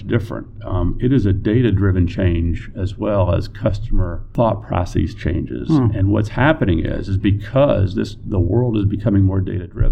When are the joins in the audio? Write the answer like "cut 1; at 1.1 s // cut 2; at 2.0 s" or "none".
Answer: cut 1; at 4.2 s